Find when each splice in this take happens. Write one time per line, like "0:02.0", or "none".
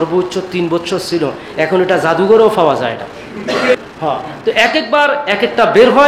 0:03.7